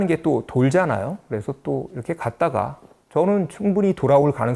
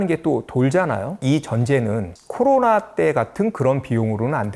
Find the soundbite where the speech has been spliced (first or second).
second